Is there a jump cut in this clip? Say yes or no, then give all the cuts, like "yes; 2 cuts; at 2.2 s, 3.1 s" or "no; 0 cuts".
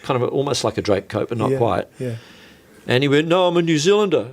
no; 0 cuts